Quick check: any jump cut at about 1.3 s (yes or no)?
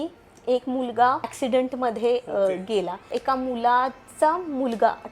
yes